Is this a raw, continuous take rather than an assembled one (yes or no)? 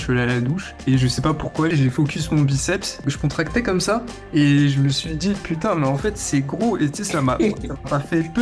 no